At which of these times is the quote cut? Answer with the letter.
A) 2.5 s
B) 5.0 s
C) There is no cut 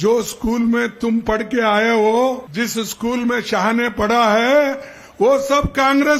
A